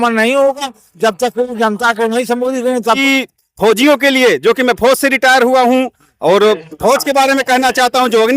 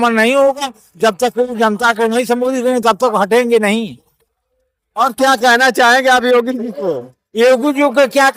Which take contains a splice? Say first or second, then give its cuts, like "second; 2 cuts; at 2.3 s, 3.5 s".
first; 1 cut; at 2.8 s